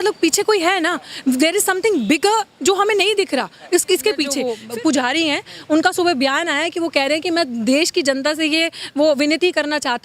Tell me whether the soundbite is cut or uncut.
cut